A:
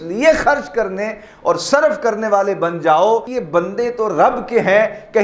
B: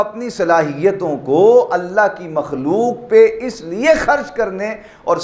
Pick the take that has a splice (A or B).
A